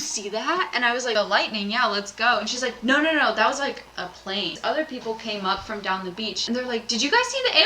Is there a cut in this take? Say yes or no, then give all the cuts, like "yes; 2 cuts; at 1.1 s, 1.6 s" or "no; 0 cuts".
yes; 3 cuts; at 1.1 s, 4.6 s, 6.4 s